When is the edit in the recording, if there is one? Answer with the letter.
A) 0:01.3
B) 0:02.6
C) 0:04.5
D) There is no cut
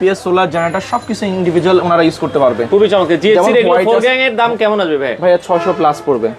D